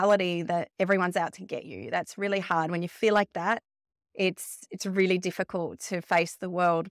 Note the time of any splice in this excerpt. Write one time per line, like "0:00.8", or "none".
none